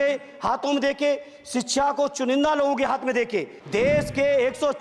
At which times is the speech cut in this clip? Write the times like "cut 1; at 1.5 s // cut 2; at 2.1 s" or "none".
cut 1; at 3.6 s